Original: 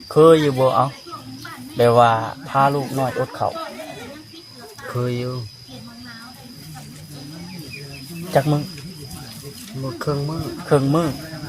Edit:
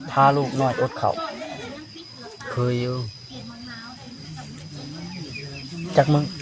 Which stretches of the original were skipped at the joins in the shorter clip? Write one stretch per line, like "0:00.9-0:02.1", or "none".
none